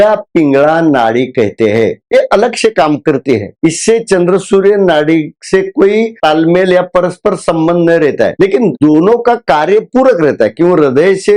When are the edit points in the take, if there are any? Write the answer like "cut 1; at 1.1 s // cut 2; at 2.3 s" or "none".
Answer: none